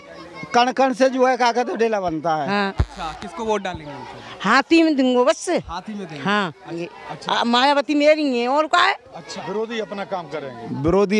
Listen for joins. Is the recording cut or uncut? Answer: cut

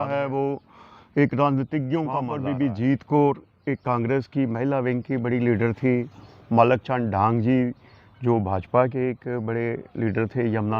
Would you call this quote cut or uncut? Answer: cut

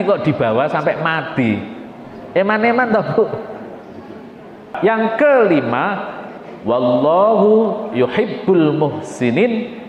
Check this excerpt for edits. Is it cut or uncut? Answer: uncut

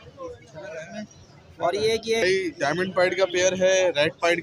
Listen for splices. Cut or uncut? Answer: cut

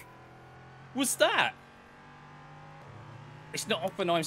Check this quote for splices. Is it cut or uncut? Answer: cut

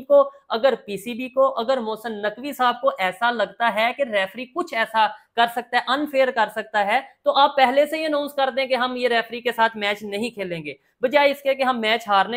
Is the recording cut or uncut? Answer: uncut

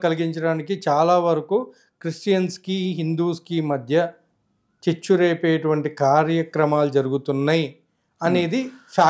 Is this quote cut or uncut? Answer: uncut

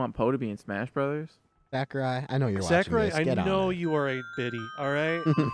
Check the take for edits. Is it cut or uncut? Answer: uncut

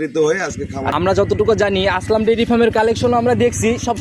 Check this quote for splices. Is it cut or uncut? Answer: cut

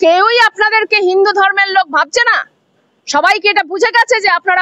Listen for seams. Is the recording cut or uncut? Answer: uncut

